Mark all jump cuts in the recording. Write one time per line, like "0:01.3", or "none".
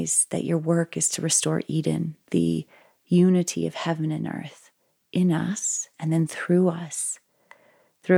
0:05.9